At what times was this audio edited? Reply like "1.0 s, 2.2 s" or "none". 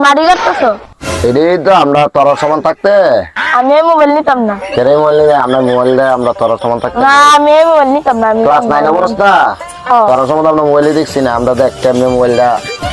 1.3 s